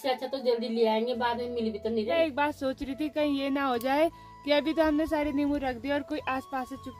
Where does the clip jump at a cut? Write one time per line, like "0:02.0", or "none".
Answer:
0:02.2